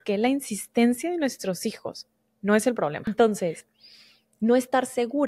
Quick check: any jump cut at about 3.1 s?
yes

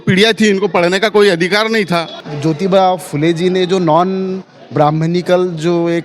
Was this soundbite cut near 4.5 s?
no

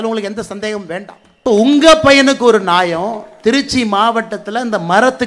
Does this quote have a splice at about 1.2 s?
yes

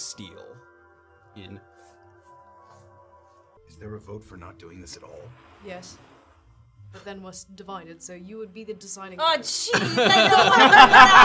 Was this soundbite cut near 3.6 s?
yes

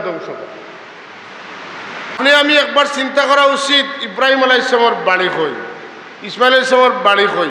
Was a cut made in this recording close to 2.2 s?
yes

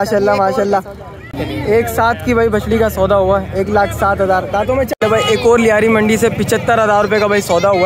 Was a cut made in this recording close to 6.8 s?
no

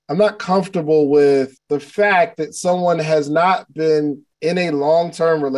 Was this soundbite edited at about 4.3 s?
yes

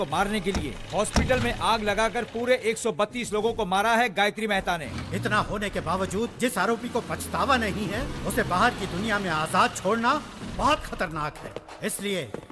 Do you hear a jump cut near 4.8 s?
yes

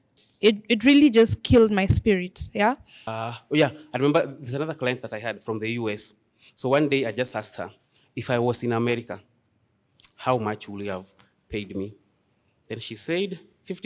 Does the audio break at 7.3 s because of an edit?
no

